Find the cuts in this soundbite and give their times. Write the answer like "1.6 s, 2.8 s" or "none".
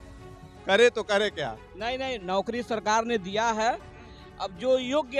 1.6 s